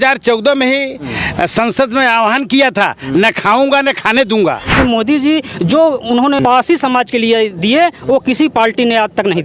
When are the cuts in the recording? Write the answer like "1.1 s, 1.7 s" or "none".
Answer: 4.7 s, 6.4 s